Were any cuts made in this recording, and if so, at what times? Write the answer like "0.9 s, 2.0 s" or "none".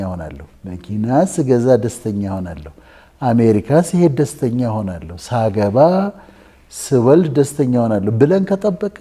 none